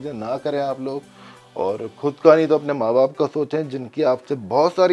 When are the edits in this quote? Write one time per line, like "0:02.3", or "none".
none